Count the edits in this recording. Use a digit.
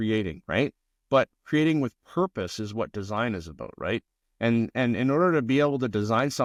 0